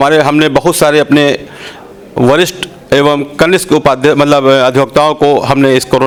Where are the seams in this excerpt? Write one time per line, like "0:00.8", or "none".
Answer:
none